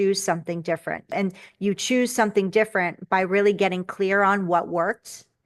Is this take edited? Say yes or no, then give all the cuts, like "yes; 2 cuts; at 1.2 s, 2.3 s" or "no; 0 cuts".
yes; 1 cut; at 1.1 s